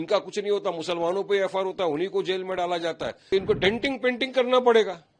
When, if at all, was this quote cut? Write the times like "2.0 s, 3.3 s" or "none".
3.3 s